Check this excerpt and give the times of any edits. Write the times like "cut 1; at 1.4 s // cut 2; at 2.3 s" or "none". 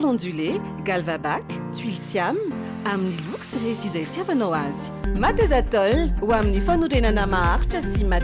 none